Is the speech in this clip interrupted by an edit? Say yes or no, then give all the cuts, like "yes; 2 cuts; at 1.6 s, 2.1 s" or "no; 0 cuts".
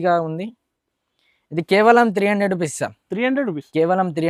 no; 0 cuts